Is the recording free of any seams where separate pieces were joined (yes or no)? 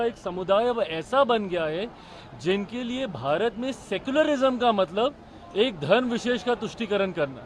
yes